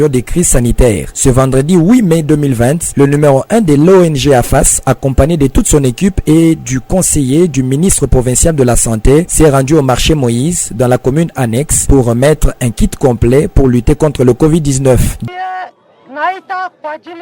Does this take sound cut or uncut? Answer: uncut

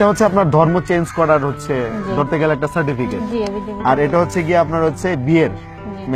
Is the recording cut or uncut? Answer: uncut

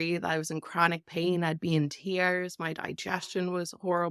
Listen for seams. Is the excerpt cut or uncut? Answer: uncut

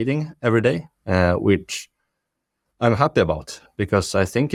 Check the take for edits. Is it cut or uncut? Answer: uncut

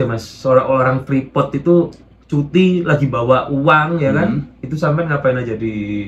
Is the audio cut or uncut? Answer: uncut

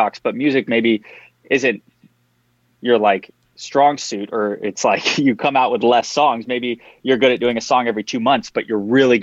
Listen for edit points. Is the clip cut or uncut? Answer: uncut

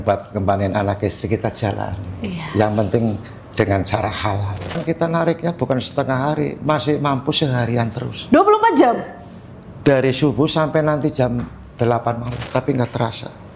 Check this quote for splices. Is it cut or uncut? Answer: cut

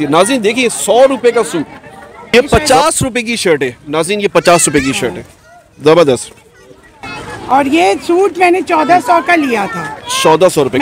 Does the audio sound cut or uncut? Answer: cut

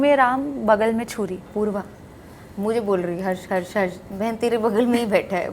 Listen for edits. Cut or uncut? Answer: cut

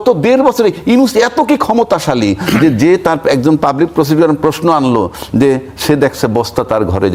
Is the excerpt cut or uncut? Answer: uncut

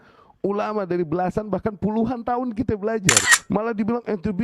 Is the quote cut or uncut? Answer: cut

